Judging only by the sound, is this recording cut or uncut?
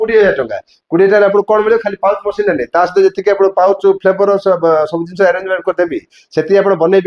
uncut